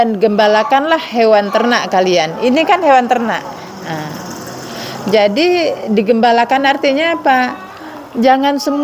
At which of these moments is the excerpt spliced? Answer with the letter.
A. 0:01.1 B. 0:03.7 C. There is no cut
C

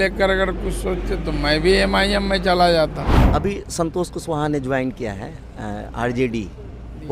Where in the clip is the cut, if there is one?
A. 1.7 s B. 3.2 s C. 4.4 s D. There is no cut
B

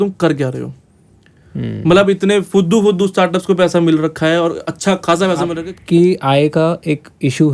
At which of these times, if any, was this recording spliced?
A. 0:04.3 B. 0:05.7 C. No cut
B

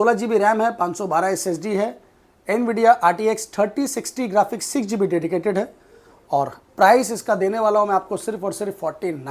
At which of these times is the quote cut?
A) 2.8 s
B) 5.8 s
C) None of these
C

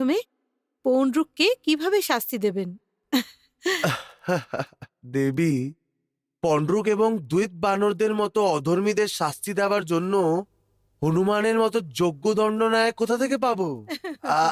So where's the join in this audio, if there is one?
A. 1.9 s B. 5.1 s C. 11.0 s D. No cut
D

